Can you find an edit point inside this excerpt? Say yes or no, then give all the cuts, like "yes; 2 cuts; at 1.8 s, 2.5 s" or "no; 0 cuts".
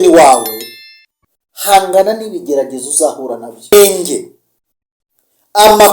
yes; 1 cut; at 3.7 s